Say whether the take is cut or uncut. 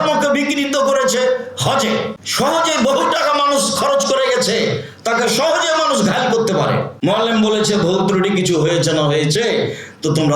cut